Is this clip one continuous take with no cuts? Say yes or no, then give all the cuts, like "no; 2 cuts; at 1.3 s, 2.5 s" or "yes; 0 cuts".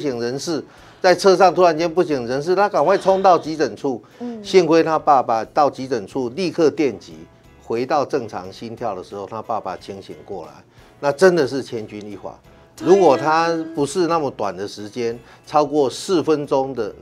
yes; 0 cuts